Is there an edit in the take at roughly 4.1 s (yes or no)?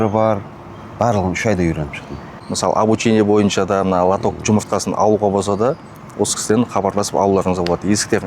no